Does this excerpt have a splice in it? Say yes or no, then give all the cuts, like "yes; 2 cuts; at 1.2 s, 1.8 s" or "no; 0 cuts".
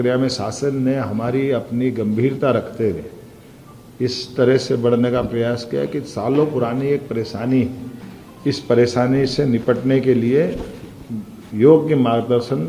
no; 0 cuts